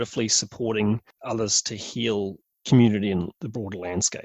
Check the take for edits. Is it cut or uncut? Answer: cut